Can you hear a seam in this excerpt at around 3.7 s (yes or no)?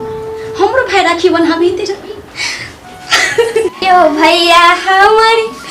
yes